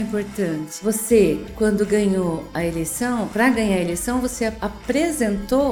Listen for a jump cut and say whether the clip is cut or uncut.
uncut